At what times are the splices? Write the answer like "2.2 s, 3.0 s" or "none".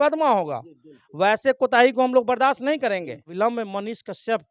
3.3 s